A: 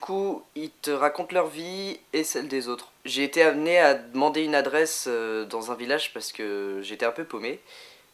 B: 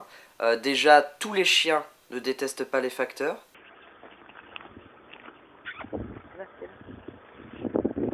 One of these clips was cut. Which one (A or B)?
A